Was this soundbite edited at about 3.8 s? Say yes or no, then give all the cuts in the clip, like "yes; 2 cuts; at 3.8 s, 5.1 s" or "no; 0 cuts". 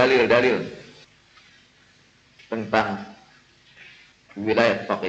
no; 0 cuts